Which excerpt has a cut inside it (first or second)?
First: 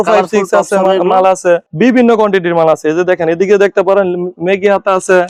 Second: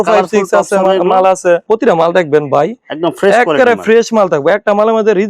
second